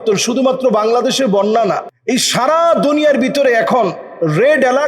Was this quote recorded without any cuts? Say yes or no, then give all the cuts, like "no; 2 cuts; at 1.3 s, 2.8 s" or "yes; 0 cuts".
no; 1 cut; at 1.9 s